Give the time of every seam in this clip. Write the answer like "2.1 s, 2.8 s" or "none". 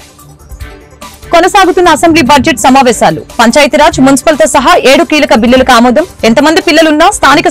0.9 s